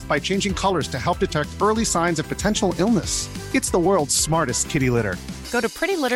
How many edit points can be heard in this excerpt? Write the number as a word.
zero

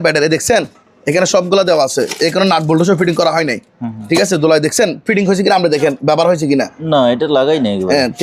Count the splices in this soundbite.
zero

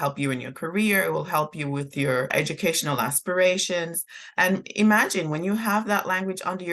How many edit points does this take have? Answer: one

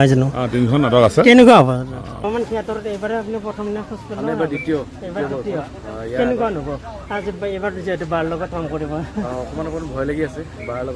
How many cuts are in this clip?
one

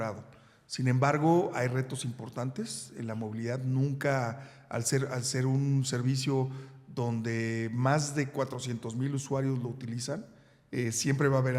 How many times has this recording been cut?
zero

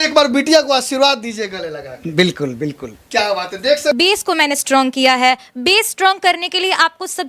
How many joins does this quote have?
one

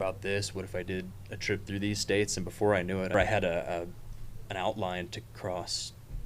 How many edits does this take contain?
one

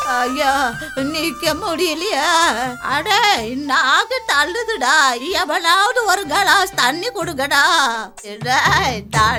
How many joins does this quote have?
zero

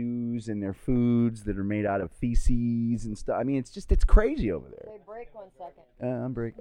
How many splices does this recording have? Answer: zero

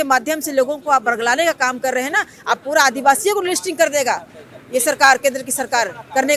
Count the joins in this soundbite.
zero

